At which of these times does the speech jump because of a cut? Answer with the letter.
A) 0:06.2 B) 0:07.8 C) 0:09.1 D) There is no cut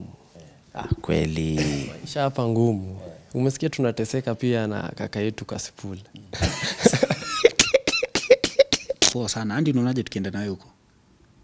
C